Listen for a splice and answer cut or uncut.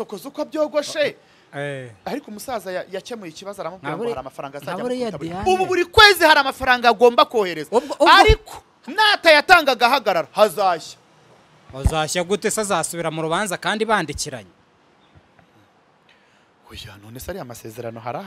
uncut